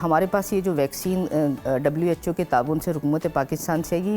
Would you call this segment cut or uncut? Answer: uncut